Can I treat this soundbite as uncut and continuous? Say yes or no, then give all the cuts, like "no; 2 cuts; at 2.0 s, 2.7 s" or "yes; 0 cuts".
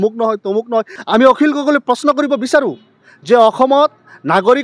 no; 1 cut; at 0.9 s